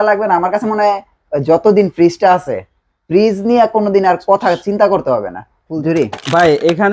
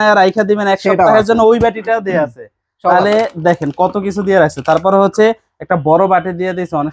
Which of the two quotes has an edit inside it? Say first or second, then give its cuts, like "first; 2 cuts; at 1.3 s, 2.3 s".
first; 1 cut; at 5.6 s